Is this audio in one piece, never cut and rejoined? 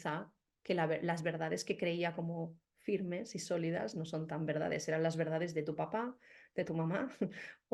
yes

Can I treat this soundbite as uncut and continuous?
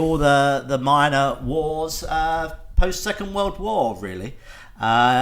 yes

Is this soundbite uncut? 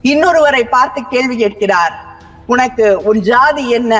yes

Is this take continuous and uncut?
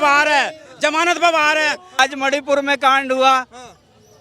no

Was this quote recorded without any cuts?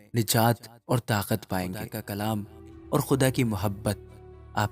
no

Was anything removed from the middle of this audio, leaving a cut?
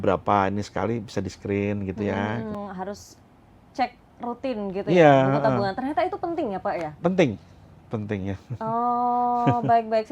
yes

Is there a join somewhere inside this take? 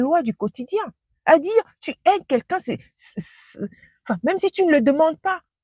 no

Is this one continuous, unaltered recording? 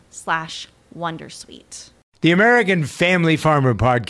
no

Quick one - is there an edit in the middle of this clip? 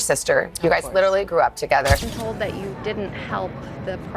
yes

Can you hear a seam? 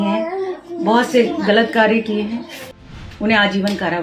yes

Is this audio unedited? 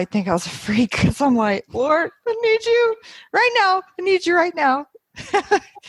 yes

